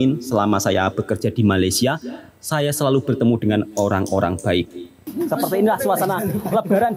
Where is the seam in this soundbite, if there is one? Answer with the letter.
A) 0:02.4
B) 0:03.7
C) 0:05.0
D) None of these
C